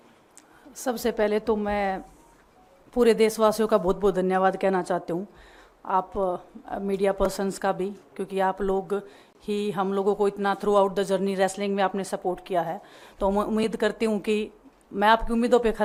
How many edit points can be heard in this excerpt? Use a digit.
0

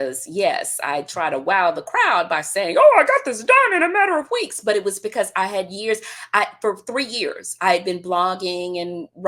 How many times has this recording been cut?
0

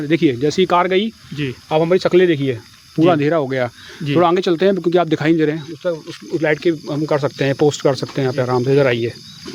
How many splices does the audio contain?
0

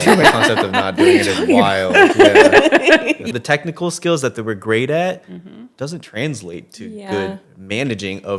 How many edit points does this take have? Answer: 1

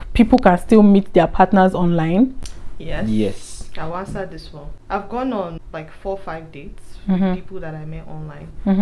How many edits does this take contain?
0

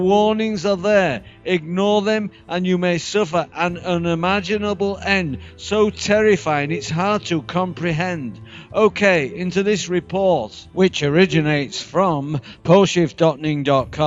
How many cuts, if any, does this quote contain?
1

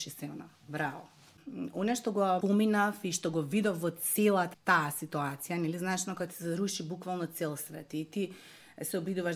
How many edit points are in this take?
3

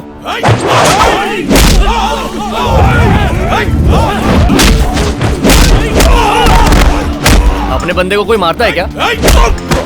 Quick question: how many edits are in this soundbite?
1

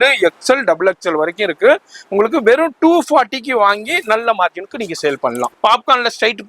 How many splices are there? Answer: 1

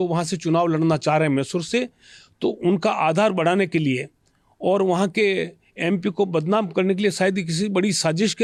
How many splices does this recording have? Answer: 0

